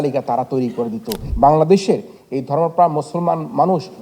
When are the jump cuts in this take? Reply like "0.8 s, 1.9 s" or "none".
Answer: 1.2 s